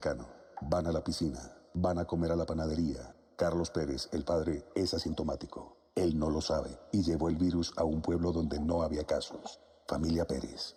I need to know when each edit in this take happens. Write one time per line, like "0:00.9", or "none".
none

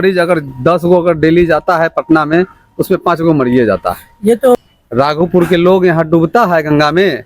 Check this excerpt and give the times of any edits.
0:04.6

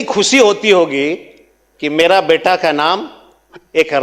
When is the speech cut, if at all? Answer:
none

